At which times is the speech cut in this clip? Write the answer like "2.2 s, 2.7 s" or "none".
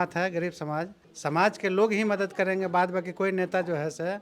1.0 s